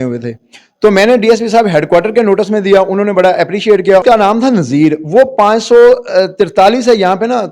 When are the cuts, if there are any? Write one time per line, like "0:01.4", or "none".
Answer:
0:04.0